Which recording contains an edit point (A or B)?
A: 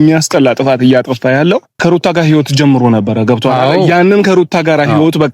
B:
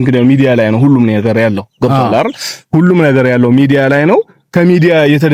A